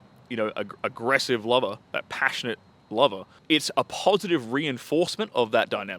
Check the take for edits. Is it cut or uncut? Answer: cut